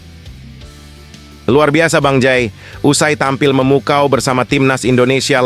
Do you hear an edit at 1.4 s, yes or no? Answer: yes